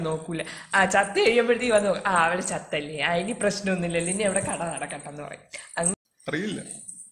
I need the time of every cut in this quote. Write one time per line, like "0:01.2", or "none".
0:05.9